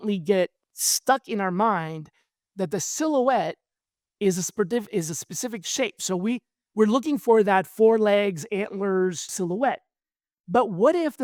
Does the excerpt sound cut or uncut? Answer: uncut